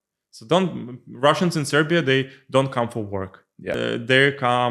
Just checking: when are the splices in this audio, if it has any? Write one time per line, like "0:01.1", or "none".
0:03.8

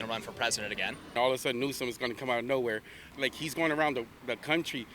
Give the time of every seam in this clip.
0:01.1
0:03.0

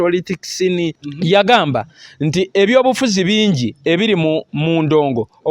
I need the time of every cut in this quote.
0:01.0

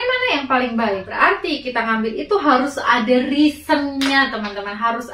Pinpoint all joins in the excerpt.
0:01.1

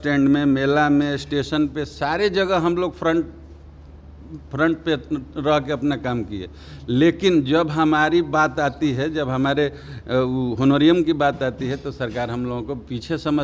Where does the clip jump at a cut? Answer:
none

